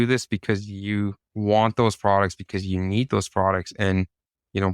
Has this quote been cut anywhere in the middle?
yes; 1 cut; at 1.2 s

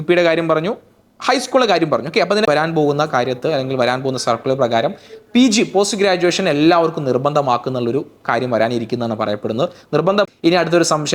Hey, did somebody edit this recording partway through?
yes; 2 cuts; at 2.5 s, 10.3 s

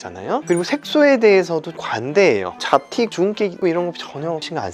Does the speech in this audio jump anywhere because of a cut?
no; 0 cuts

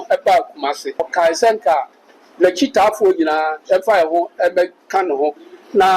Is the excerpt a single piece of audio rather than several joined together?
no; 1 cut; at 1.1 s

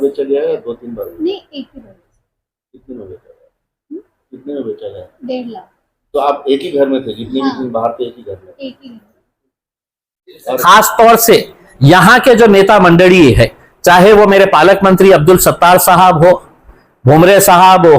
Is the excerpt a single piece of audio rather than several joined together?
no; 1 cut; at 10.6 s

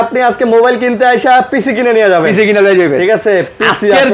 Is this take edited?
no; 0 cuts

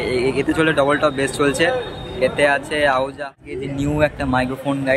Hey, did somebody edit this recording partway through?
yes; 1 cut; at 3.4 s

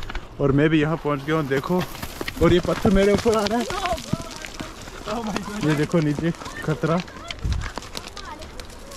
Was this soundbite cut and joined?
no; 0 cuts

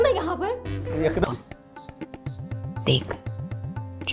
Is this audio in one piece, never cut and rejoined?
no; 1 cut; at 1.2 s

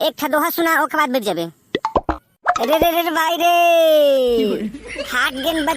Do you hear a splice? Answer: yes; 1 cut; at 2.1 s

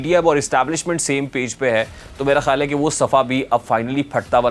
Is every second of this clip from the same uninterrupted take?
yes; 0 cuts

